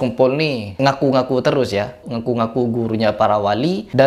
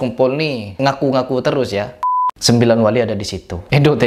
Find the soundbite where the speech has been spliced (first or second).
second